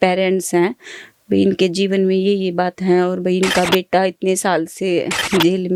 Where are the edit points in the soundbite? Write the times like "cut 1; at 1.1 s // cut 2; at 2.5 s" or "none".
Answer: none